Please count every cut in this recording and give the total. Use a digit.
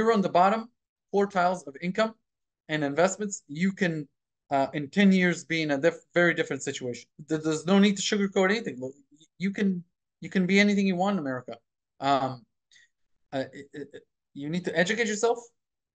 0